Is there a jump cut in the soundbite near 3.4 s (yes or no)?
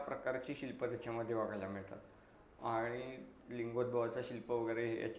yes